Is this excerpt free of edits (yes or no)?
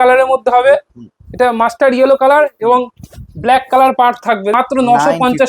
no